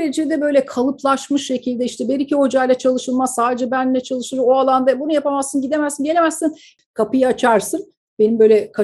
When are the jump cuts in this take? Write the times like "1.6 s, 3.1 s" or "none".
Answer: 6.7 s